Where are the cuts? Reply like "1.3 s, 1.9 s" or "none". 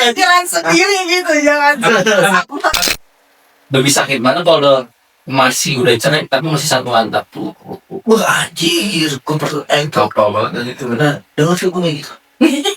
2.8 s